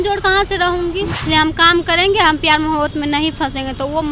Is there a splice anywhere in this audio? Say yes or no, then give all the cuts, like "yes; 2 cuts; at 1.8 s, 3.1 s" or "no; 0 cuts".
yes; 1 cut; at 1.2 s